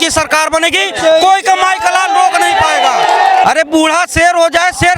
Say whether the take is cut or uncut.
cut